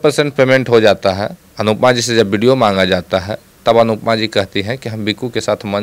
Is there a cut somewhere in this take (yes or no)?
no